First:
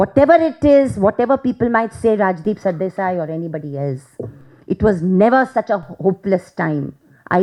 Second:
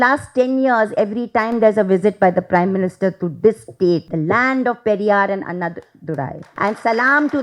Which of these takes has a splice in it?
second; 2 cuts; at 4.1 s, 6.4 s

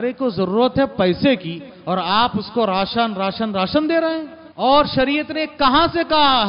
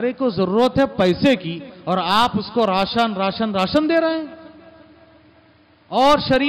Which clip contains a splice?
first; 1 cut; at 4.4 s

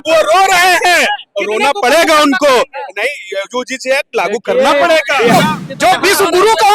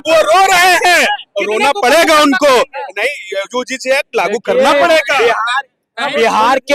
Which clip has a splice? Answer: first; 1 cut; at 5.3 s

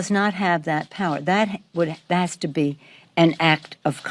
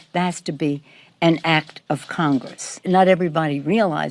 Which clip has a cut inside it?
second; 1 cut; at 3.2 s

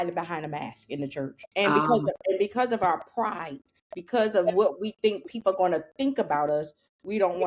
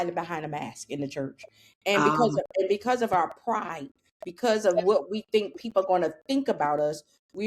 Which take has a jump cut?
first; 1 cut; at 1.4 s

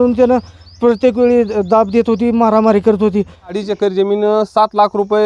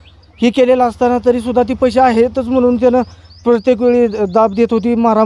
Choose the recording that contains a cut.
first; 1 cut; at 3.6 s

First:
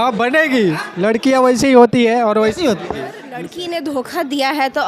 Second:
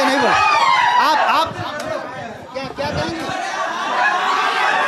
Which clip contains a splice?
first; 1 cut; at 3.5 s

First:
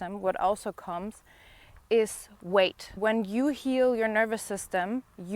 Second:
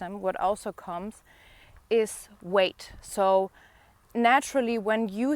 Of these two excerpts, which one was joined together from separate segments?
first; 1 cut; at 3.0 s

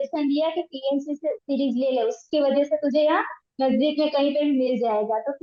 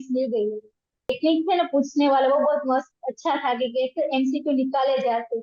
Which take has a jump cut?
second; 1 cut; at 1.2 s

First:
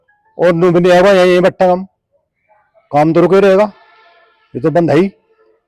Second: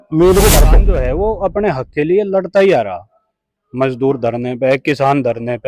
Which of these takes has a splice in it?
second; 1 cut; at 0.9 s

